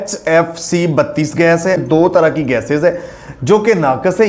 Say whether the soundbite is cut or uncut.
cut